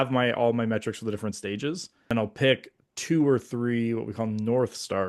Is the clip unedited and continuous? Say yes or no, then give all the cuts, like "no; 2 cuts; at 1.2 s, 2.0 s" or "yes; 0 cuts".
no; 1 cut; at 2.1 s